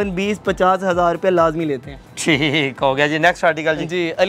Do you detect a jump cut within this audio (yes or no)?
no